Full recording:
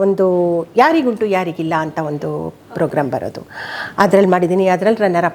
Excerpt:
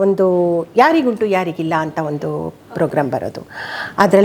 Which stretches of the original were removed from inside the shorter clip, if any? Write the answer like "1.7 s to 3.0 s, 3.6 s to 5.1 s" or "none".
none